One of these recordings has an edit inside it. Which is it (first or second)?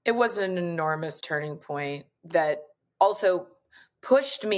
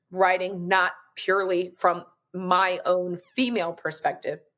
first